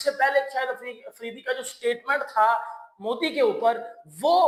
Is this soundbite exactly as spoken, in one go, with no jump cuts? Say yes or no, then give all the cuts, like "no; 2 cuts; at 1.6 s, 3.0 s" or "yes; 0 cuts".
yes; 0 cuts